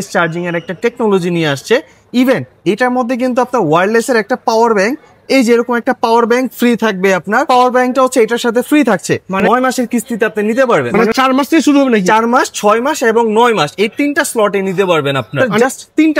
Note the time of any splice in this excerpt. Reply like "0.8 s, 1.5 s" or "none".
7.5 s, 9.4 s, 11.0 s, 15.4 s